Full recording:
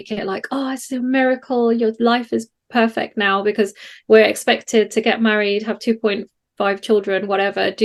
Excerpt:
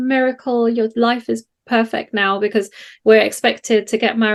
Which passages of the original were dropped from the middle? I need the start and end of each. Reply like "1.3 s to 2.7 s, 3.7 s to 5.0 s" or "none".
none